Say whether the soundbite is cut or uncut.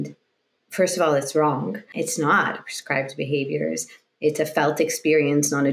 cut